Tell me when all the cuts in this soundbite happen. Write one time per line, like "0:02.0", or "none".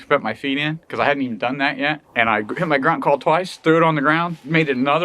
0:02.0